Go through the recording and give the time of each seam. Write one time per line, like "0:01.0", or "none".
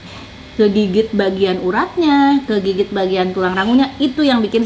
none

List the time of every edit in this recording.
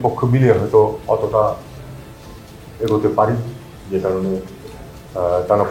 none

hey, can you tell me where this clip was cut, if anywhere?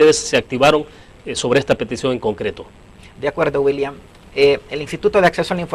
none

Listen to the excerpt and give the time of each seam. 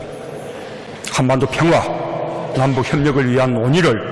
0:02.3

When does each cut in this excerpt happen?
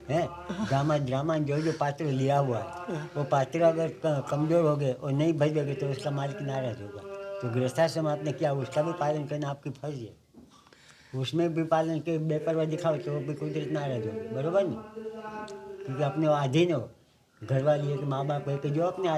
none

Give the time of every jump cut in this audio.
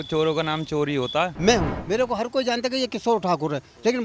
0:01.3

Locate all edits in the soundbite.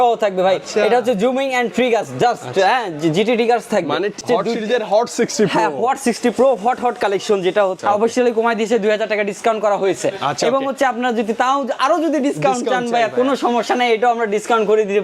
0:04.2
0:07.8

